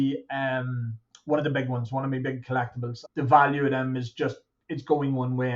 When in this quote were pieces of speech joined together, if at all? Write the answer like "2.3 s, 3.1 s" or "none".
3.0 s